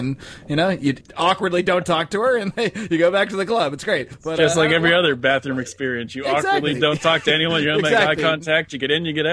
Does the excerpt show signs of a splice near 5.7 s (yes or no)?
no